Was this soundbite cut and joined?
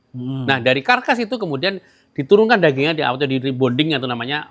no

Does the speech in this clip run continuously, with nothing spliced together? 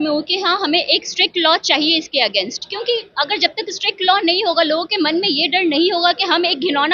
yes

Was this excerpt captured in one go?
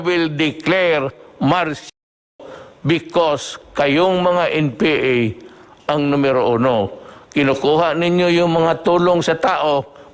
yes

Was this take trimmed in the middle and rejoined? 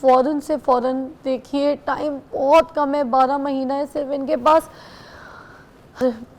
no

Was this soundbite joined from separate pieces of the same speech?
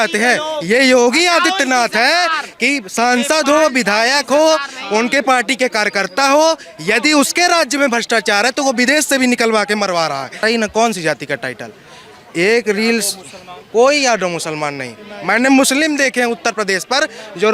yes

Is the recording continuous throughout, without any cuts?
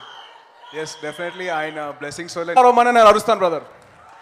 yes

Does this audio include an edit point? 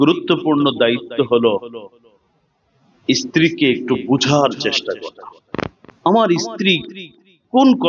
yes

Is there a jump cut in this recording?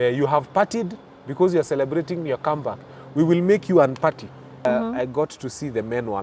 yes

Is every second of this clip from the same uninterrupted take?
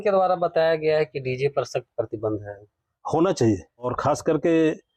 no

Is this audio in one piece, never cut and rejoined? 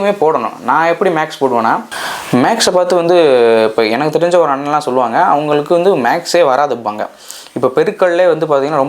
no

